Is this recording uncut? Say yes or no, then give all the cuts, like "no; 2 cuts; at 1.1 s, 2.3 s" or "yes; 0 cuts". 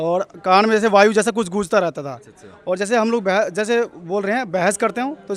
yes; 0 cuts